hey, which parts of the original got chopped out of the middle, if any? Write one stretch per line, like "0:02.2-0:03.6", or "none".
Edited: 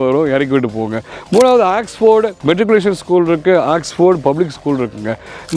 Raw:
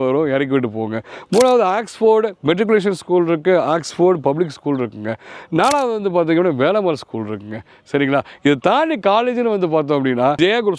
none